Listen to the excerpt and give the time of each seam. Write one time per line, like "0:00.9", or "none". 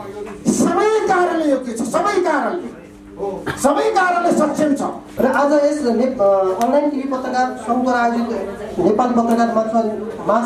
0:05.0

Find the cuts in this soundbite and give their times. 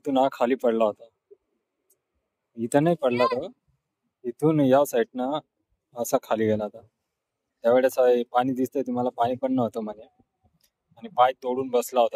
none

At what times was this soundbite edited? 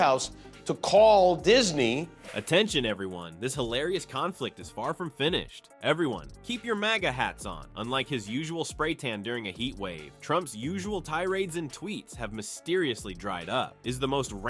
none

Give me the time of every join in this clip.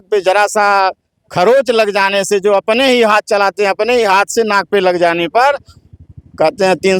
none

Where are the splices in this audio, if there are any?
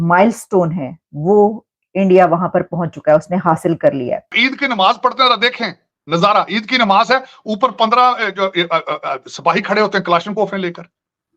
0:04.3

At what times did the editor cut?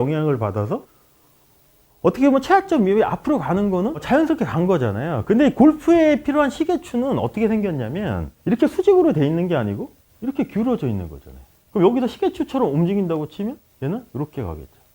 none

